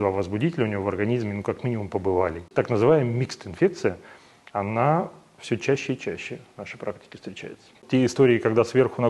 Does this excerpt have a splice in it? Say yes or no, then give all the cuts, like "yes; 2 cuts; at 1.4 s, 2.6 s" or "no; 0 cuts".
yes; 2 cuts; at 2.5 s, 7.8 s